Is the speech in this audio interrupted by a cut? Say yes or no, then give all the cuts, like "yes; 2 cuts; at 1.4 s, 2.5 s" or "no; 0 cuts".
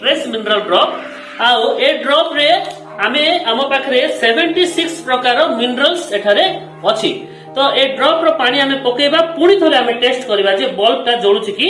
no; 0 cuts